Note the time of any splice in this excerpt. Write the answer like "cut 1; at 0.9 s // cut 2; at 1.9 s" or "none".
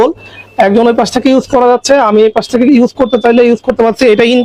none